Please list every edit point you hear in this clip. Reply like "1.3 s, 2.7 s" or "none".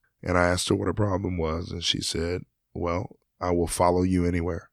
none